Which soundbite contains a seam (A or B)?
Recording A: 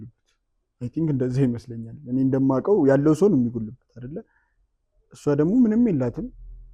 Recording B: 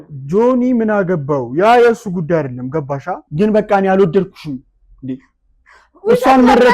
B